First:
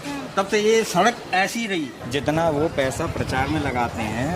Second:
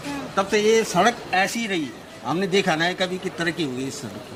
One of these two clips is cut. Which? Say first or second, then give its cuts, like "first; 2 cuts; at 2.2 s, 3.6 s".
first; 1 cut; at 2.0 s